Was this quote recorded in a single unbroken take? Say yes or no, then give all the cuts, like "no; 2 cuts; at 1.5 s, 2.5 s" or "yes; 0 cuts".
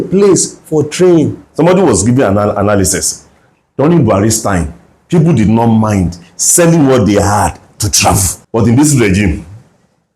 no; 2 cuts; at 1.4 s, 8.3 s